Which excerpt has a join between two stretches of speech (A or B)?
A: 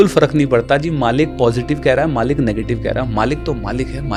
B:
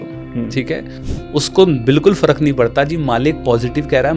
B